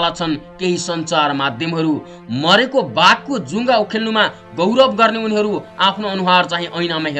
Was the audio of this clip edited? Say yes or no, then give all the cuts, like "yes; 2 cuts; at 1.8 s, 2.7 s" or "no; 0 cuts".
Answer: no; 0 cuts